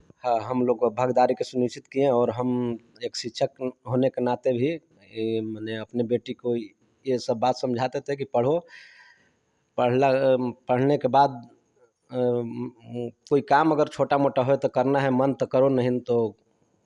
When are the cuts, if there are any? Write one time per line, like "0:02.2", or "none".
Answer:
none